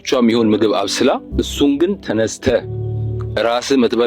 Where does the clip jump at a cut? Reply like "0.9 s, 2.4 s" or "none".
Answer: 1.3 s